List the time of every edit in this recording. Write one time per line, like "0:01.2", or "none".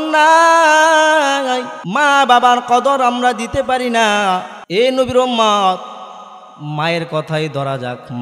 0:01.8
0:04.6